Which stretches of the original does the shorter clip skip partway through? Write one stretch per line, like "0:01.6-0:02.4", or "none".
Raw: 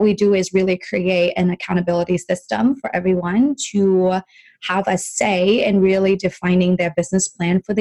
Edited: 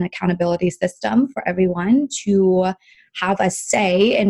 none